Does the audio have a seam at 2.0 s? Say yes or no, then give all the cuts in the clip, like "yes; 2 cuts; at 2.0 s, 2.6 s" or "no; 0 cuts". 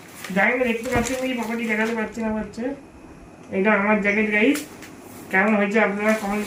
no; 0 cuts